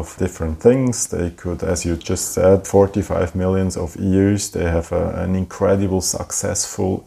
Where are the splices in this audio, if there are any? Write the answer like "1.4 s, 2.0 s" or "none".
none